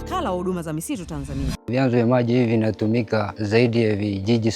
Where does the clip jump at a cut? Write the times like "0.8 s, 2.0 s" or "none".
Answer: 1.7 s, 3.4 s

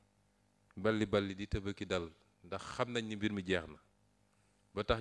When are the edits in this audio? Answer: none

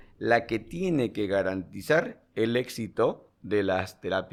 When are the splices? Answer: none

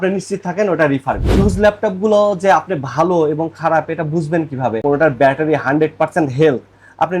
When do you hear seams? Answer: 1.4 s, 4.8 s

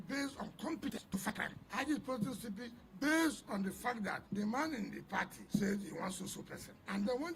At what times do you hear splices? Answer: 1.3 s

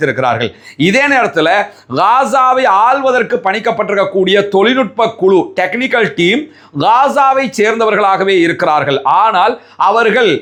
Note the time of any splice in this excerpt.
none

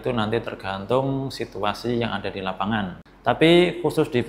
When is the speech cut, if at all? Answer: 3.1 s

